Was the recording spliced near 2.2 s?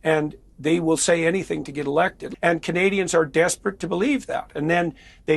yes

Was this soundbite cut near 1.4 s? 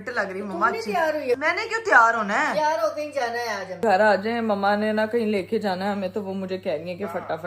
yes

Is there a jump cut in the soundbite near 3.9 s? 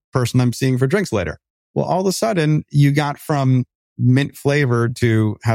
yes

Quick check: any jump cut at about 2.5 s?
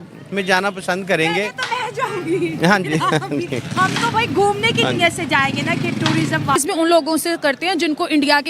no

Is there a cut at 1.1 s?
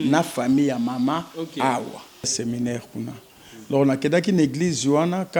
no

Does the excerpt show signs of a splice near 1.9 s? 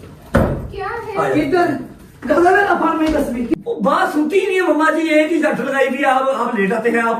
no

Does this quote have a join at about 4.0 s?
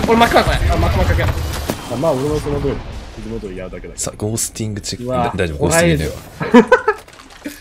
no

